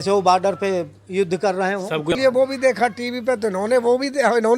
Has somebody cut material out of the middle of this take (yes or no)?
yes